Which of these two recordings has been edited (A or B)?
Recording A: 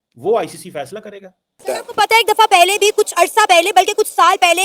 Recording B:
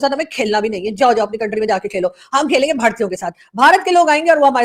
A